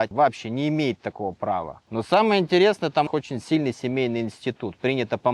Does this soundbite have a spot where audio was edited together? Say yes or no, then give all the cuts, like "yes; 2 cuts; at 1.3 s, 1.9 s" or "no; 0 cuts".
no; 0 cuts